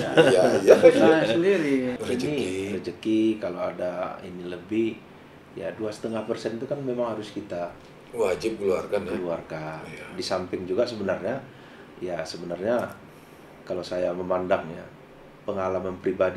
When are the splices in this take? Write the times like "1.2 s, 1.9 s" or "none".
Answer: 1.9 s